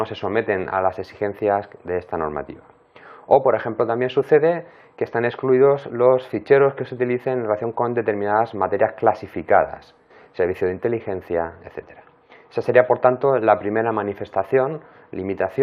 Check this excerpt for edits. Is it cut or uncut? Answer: cut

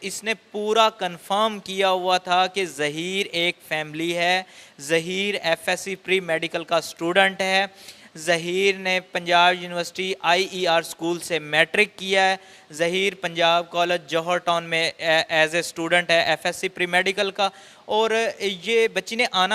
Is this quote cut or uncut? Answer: uncut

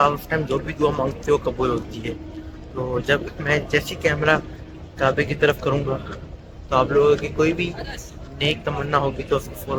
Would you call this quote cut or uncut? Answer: uncut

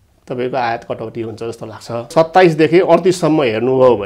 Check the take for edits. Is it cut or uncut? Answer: cut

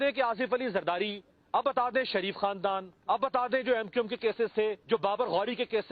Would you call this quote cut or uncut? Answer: cut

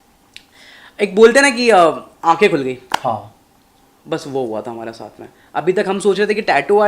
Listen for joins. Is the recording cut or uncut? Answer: uncut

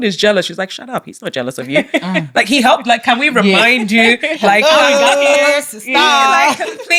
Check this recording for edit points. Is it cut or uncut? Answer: uncut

